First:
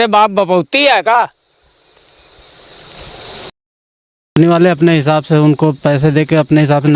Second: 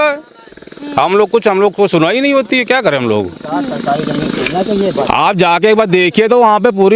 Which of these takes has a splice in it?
first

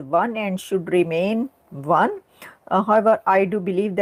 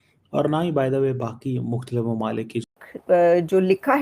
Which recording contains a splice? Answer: second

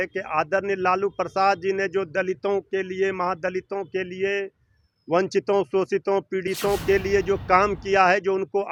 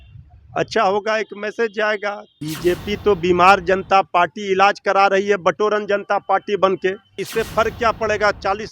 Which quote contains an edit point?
second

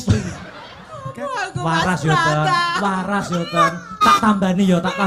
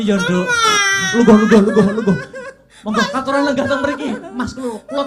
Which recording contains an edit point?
first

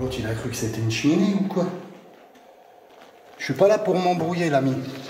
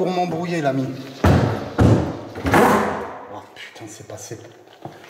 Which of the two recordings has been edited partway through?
first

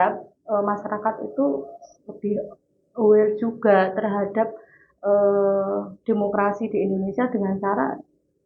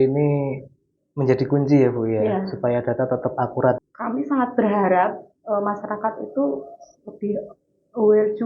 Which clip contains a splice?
second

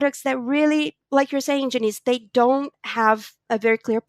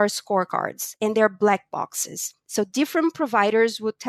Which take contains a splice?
first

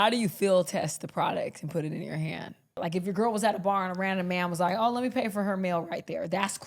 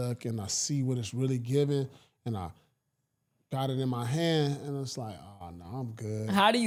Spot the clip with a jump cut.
first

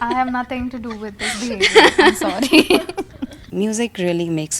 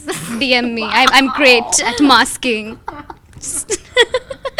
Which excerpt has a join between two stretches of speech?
first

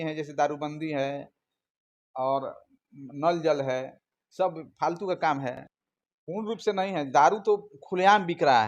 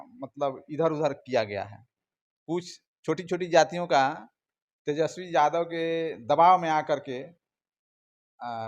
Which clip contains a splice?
first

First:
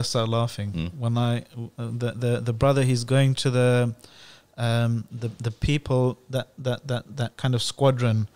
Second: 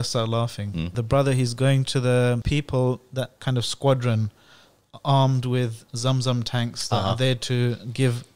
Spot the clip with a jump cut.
second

